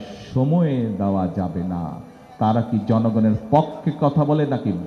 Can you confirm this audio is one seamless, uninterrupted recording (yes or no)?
yes